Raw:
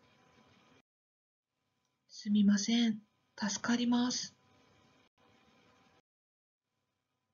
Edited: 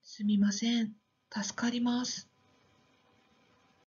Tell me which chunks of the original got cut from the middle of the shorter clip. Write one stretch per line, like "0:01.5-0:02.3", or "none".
0:05.1-0:05.2